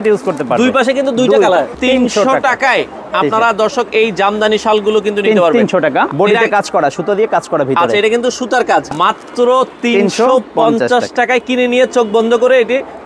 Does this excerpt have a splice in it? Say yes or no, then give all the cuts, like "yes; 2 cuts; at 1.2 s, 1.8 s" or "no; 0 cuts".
yes; 3 cuts; at 1.7 s, 6.1 s, 8.9 s